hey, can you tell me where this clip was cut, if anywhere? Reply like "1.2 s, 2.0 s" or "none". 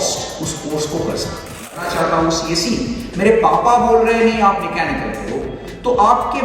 1.7 s